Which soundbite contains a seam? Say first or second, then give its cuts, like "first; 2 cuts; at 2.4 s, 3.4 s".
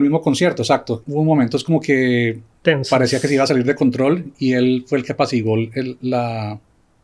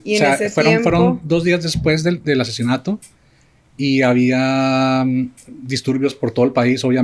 first; 1 cut; at 1.0 s